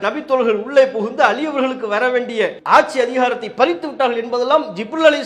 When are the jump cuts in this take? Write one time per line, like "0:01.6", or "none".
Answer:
0:02.6